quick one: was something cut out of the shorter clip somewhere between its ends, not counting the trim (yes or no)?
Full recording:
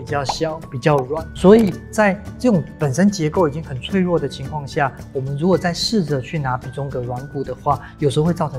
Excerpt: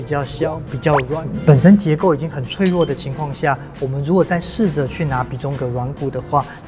yes